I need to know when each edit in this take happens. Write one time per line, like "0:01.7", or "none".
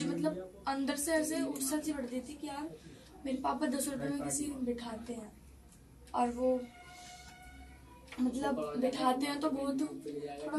none